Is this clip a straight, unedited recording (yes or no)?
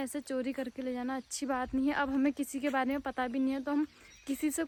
yes